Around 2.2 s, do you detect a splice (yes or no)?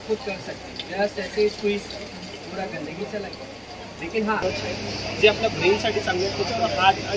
no